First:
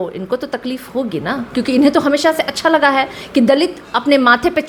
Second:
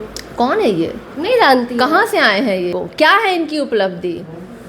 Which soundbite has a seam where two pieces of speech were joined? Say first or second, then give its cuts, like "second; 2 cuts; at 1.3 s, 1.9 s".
second; 1 cut; at 2.8 s